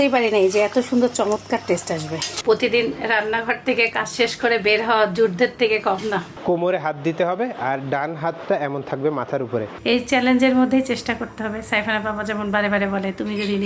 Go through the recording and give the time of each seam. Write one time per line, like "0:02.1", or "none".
0:02.3
0:06.3
0:09.7